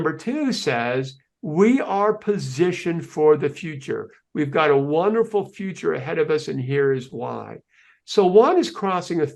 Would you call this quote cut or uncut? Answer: uncut